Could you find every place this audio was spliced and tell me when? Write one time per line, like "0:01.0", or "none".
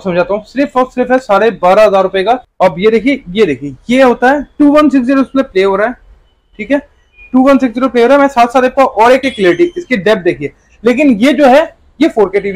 0:02.5
0:09.2